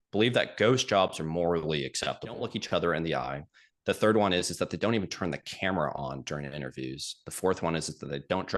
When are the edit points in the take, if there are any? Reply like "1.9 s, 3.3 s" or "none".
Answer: 2.5 s